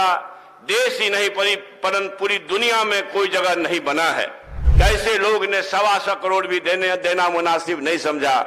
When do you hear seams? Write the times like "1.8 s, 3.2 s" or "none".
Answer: 4.6 s